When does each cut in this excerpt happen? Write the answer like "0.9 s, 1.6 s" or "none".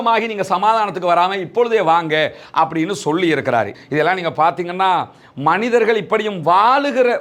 3.8 s